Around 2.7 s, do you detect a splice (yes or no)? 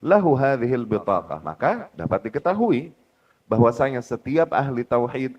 no